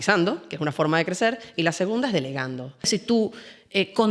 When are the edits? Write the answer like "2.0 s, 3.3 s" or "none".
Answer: 2.9 s